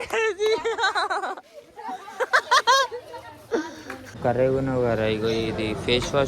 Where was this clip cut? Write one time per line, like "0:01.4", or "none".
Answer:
0:04.1